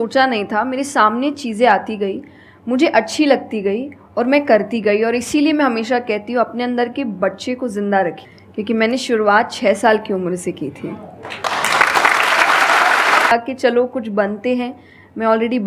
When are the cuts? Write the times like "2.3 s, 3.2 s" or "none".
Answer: 8.2 s, 13.3 s